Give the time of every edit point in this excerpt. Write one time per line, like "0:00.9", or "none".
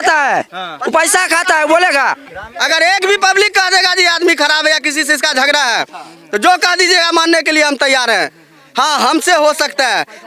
0:02.2

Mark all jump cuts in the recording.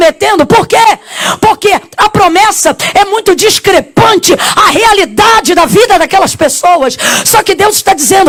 none

